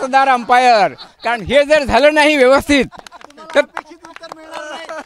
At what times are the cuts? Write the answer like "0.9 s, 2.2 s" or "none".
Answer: none